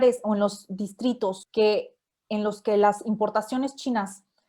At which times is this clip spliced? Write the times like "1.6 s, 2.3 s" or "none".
1.4 s